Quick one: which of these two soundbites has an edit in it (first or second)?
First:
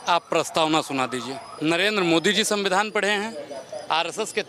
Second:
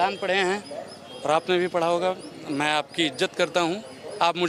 first